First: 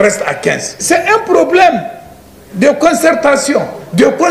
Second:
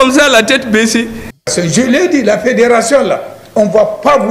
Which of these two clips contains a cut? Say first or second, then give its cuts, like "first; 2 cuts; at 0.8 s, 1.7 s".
second; 1 cut; at 1.2 s